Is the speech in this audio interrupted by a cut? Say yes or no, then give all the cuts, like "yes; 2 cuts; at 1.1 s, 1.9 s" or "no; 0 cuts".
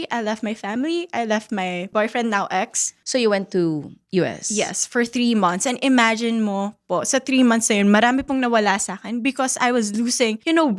yes; 2 cuts; at 1.9 s, 2.9 s